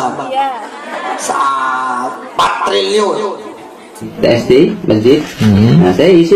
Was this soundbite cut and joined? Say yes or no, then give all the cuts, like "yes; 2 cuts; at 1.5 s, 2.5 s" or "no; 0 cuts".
yes; 1 cut; at 4.1 s